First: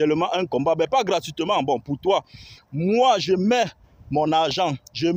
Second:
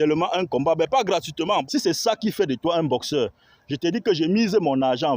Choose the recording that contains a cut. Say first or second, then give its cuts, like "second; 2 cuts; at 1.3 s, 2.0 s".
second; 1 cut; at 1.6 s